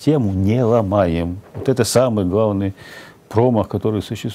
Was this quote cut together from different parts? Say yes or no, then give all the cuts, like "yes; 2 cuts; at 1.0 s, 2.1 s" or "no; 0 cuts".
no; 0 cuts